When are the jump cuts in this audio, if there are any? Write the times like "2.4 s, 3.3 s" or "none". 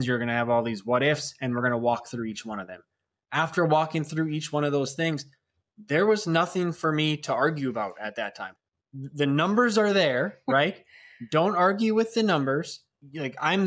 none